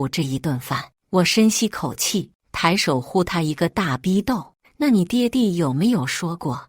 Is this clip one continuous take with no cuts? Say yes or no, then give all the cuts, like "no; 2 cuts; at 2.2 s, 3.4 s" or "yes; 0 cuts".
no; 1 cut; at 2.4 s